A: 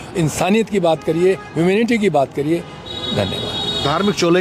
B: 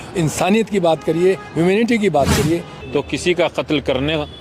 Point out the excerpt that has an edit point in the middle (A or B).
B